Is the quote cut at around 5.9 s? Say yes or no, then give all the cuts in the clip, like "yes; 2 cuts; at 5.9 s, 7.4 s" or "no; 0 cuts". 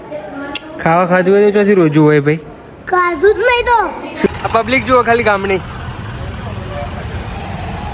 no; 1 cut; at 4.3 s